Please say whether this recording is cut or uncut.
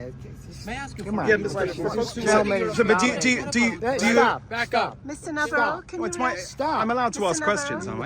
cut